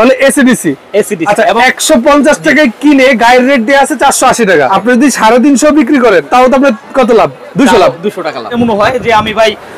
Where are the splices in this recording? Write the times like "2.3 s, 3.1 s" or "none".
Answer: 1.2 s, 4.7 s, 6.3 s, 8.5 s